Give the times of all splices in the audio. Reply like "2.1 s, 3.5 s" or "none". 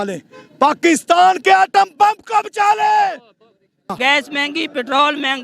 3.9 s